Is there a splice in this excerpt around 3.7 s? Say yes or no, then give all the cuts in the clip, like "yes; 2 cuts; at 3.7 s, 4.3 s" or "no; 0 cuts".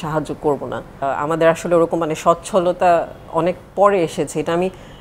no; 1 cut; at 0.9 s